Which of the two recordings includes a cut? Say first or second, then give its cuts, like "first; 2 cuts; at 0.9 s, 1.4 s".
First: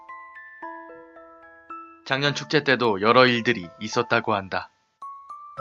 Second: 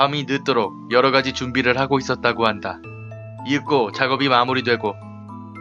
second; 1 cut; at 3.9 s